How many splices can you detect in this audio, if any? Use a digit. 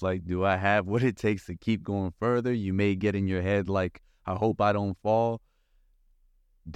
0